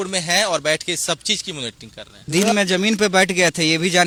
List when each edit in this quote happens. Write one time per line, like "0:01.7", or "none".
none

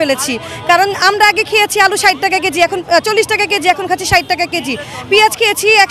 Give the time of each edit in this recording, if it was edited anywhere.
none

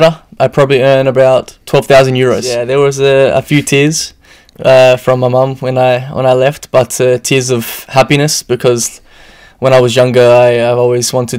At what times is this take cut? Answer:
0:02.5

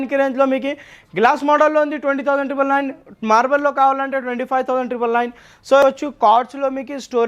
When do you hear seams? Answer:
0:05.8

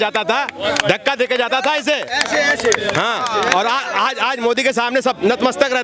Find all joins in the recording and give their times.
none

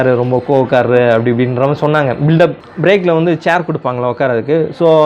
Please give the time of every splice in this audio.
0:02.6

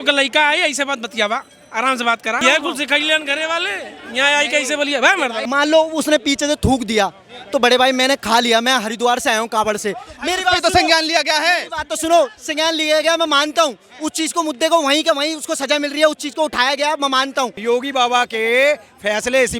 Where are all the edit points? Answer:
0:02.4
0:05.4
0:17.6

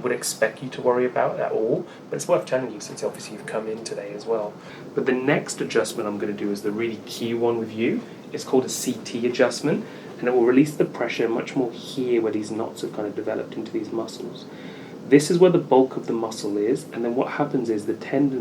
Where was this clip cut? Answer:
0:04.7

